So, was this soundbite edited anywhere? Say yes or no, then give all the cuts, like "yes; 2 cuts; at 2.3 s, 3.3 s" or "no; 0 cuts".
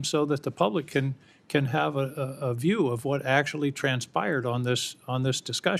no; 0 cuts